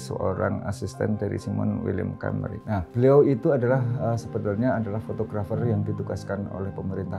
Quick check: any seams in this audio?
no; 0 cuts

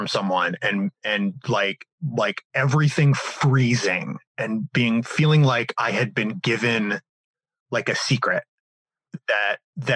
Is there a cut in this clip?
no; 0 cuts

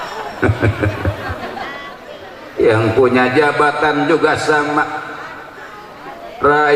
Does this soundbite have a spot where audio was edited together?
yes; 1 cut; at 2.0 s

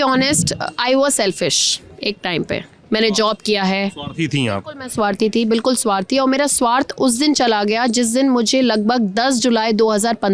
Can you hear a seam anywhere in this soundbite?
no; 0 cuts

